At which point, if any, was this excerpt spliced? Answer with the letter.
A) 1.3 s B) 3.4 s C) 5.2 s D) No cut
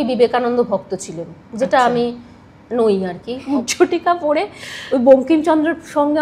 B